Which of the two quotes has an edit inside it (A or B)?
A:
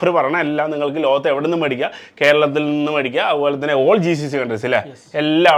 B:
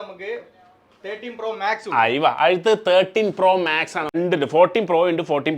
B